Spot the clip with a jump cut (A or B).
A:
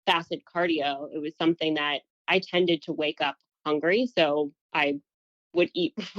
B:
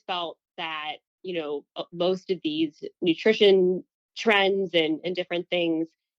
A